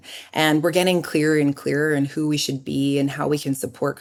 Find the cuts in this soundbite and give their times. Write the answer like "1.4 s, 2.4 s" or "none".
none